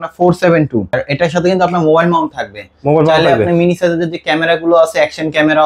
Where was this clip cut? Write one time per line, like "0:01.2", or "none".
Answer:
0:01.0